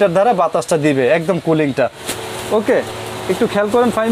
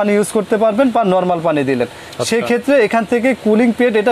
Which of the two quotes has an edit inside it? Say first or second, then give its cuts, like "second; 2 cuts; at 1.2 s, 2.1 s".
first; 1 cut; at 2.0 s